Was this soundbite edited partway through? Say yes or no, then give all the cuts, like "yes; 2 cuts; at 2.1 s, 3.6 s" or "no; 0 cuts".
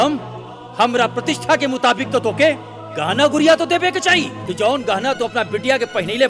yes; 1 cut; at 4.4 s